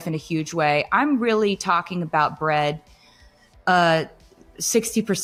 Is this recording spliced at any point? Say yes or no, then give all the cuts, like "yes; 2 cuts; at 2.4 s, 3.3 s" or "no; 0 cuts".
no; 0 cuts